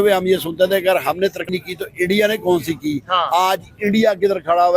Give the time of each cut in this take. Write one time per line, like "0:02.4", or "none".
0:01.4